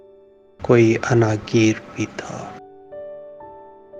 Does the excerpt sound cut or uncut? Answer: uncut